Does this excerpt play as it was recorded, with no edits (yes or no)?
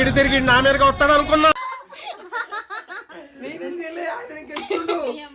yes